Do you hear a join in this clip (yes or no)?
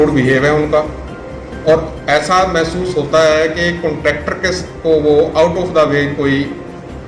no